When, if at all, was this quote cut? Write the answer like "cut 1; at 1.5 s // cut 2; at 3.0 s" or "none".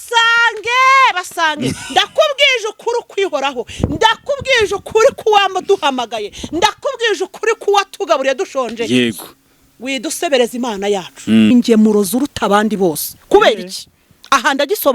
cut 1; at 11.5 s